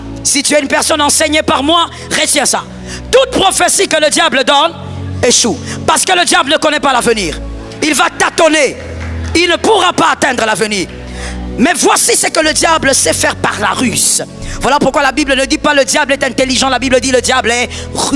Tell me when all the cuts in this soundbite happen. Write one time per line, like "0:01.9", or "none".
none